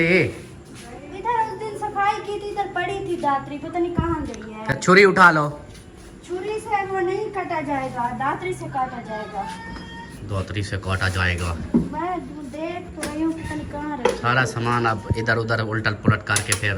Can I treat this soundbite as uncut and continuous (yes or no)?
yes